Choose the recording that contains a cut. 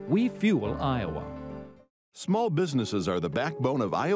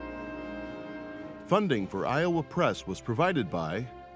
second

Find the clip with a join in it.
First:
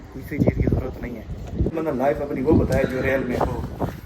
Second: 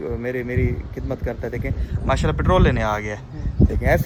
first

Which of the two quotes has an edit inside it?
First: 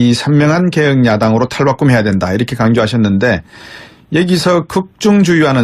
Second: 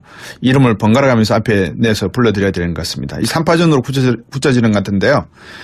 first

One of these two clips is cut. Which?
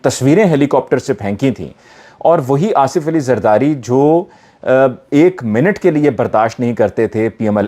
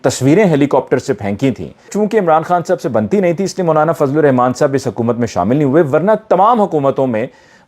second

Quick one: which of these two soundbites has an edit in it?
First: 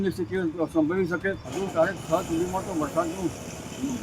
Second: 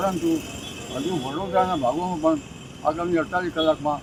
first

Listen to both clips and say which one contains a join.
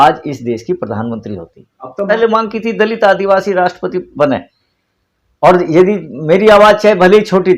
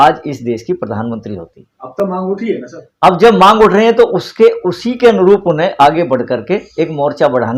first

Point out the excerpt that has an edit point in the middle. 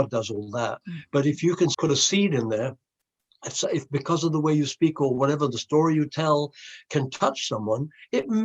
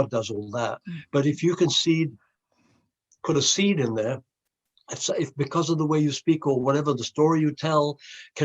first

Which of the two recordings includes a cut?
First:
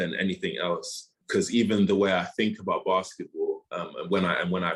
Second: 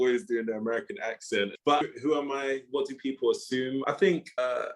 second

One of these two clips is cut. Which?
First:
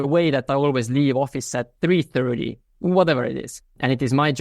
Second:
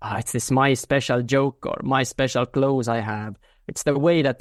first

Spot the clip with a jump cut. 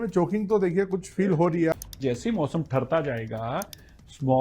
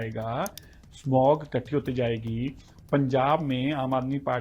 first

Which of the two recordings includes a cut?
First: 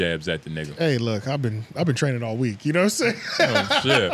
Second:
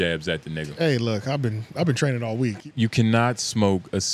second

